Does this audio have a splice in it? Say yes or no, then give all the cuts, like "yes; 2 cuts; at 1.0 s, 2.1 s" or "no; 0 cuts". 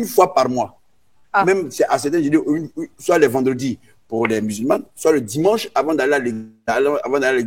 no; 0 cuts